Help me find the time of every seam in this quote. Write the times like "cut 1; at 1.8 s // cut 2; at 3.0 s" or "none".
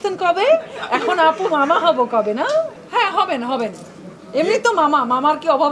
none